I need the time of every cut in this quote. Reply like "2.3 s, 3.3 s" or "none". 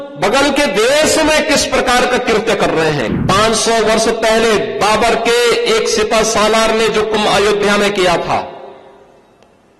3.1 s